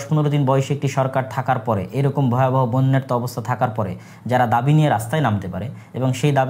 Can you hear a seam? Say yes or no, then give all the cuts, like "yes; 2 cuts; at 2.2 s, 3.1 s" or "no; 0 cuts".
no; 0 cuts